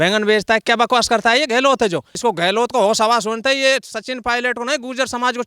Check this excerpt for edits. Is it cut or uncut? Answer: cut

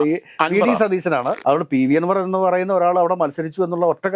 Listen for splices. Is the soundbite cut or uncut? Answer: cut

